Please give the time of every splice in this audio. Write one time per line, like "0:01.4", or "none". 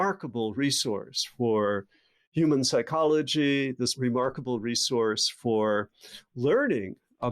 0:03.9